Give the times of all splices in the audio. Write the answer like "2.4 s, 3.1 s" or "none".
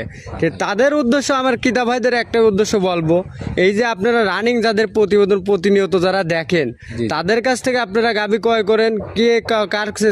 none